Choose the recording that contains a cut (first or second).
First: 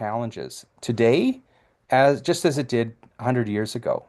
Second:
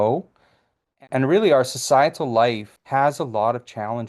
second